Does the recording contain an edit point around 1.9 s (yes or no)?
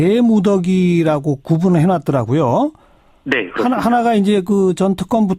no